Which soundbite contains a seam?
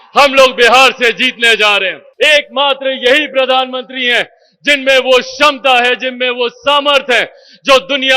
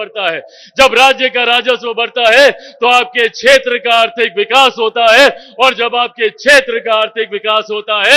first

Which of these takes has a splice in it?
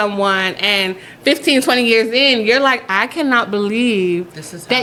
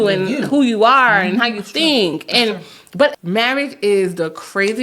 second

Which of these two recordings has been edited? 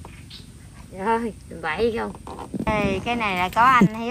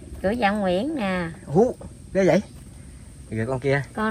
first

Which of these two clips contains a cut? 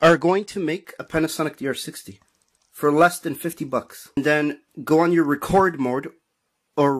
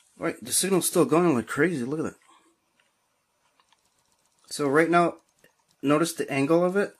first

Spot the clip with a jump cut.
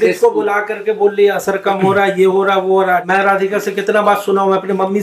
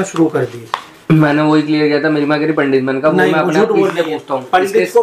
first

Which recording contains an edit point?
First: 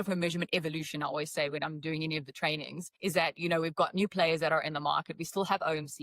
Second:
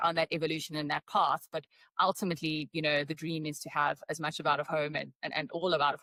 first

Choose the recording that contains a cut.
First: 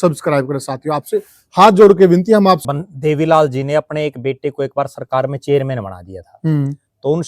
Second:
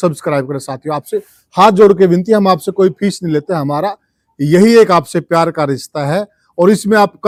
first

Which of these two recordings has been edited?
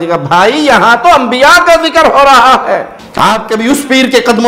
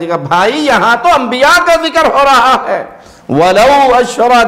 first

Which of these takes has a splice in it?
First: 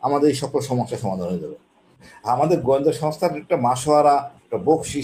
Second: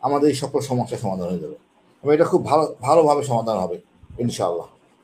first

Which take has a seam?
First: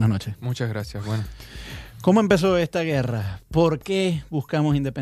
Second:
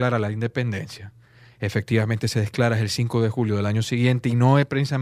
first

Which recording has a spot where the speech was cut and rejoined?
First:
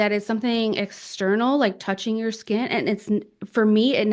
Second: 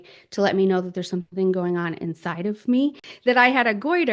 second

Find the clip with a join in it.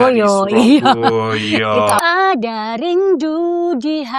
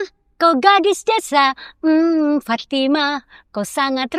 first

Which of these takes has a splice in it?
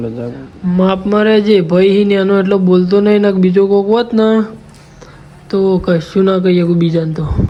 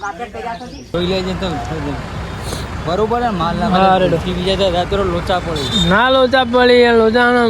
second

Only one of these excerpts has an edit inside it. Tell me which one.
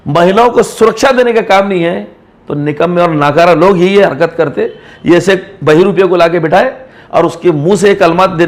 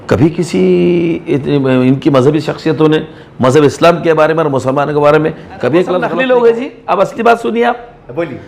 second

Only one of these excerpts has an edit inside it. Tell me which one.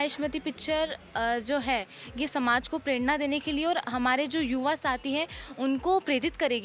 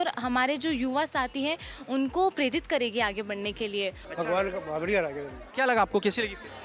second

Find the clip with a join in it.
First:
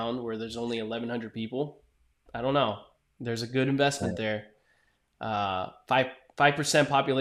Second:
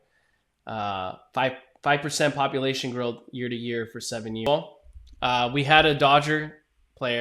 second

